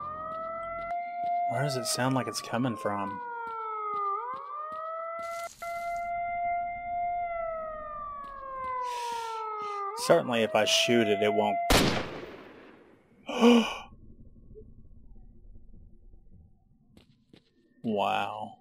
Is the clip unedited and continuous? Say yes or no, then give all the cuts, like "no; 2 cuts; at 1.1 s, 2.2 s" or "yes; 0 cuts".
no; 1 cut; at 0.9 s